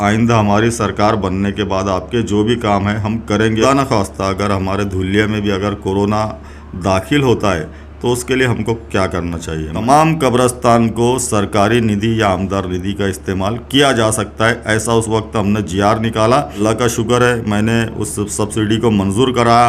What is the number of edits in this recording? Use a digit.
3